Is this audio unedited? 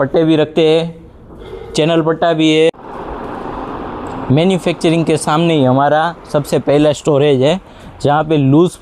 no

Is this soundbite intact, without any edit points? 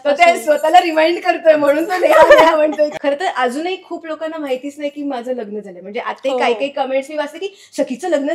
no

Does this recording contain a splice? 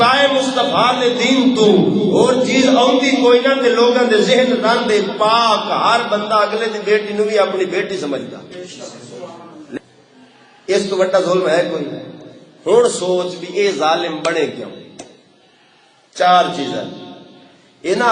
yes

